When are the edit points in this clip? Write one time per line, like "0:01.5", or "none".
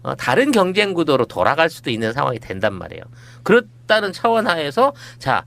0:04.3